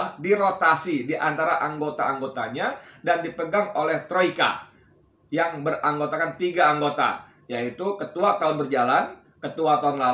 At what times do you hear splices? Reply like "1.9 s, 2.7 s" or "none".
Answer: none